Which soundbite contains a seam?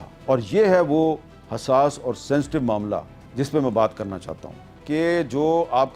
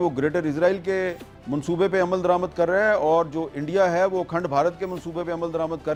first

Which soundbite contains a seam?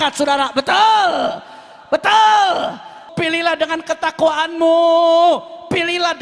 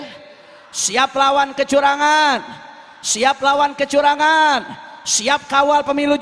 first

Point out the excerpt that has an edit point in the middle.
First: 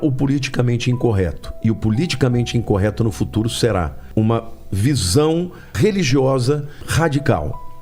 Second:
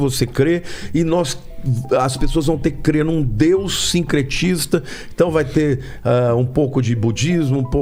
first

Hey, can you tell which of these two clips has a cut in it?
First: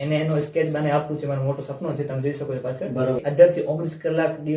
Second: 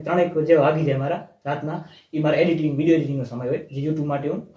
first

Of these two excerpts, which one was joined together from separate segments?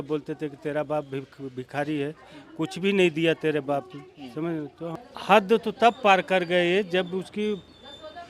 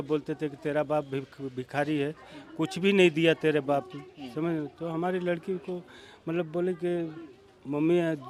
first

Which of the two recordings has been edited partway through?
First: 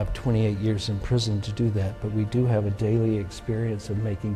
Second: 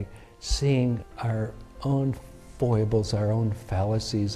second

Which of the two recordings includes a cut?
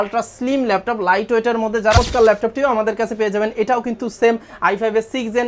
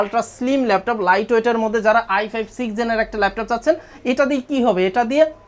first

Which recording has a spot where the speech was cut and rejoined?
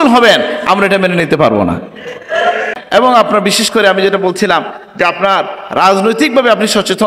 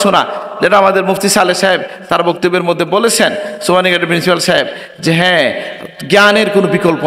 first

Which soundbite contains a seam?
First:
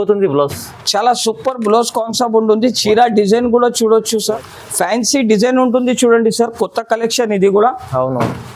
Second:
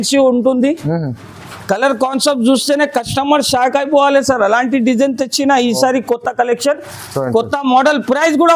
first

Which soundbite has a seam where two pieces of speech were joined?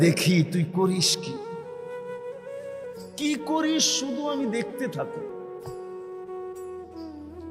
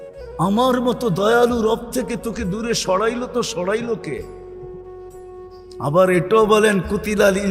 first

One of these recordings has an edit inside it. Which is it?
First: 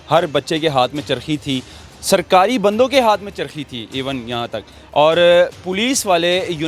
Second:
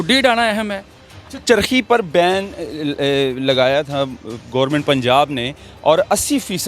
second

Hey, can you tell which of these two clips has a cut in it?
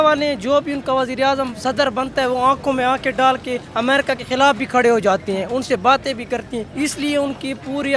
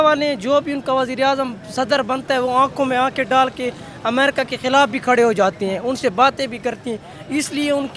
first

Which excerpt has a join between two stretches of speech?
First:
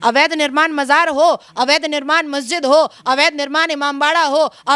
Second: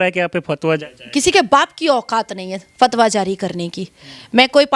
second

